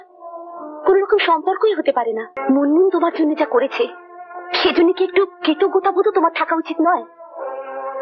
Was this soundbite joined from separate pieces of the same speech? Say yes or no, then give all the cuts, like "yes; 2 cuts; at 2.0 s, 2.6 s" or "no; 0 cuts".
yes; 1 cut; at 2.3 s